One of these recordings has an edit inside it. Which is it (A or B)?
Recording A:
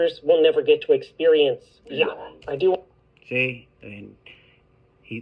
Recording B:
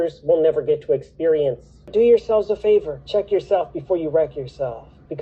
B